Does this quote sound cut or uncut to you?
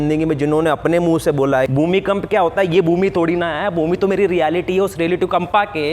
cut